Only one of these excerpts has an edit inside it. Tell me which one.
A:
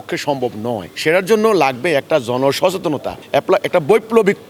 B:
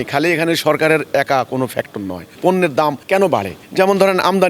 B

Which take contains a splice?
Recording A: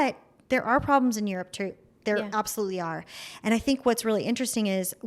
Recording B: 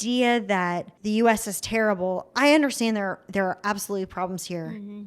B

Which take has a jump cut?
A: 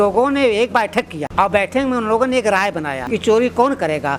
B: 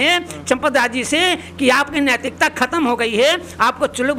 A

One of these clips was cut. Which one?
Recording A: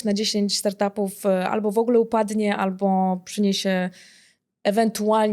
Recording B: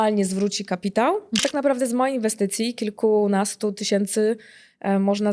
B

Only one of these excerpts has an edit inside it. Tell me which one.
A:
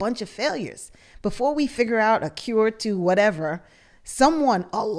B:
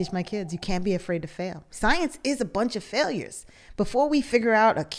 B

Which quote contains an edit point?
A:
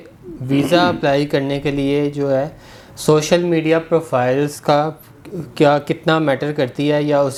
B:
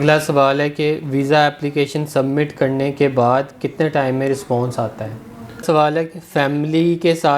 B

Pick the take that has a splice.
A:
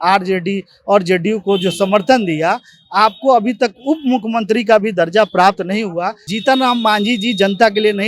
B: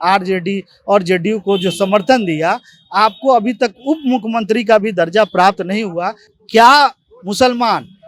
A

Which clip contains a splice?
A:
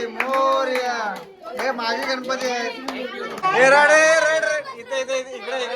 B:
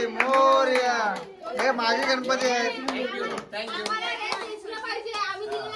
A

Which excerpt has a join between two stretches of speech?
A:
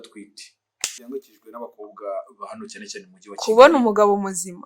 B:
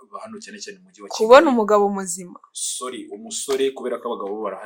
A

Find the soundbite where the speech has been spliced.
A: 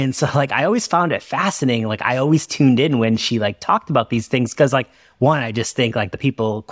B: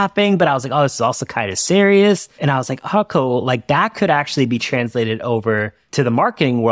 B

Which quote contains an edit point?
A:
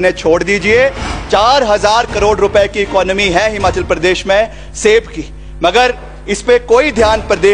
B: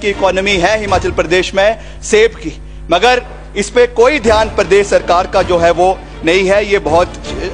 A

